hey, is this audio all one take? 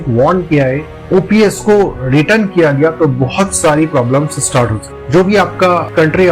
yes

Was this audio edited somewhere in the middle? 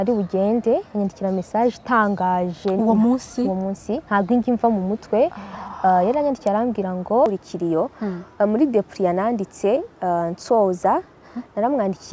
yes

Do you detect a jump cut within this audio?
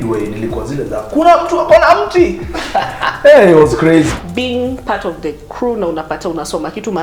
yes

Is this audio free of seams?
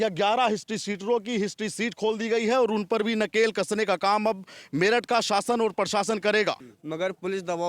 no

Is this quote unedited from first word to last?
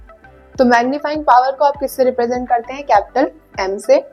yes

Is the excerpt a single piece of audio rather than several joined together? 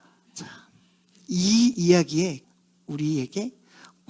no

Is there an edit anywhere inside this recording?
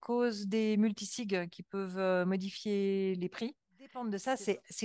yes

